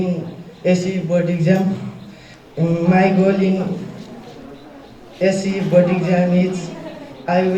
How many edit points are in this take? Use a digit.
0